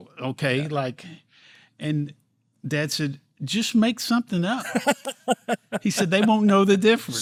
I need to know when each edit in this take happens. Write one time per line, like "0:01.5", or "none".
none